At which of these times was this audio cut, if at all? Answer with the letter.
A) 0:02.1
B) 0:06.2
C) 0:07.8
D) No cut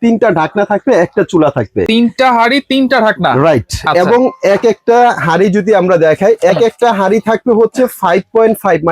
D